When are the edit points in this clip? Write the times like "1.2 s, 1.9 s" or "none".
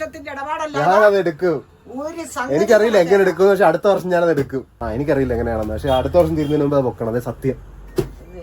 4.7 s